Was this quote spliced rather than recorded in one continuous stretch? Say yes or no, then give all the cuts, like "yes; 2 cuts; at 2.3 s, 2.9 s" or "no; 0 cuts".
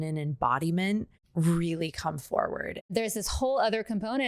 yes; 2 cuts; at 1.2 s, 2.9 s